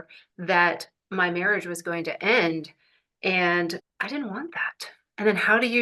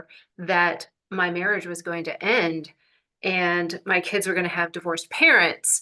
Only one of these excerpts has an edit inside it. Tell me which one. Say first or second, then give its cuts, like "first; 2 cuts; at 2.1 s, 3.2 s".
first; 1 cut; at 3.8 s